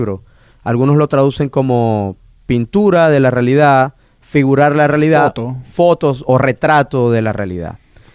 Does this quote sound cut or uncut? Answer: cut